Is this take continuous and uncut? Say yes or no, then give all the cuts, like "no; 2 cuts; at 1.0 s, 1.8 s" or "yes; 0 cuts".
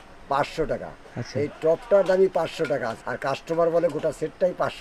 no; 1 cut; at 3.1 s